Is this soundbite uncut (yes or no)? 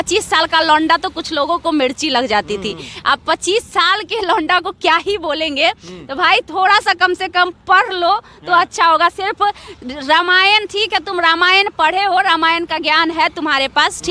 yes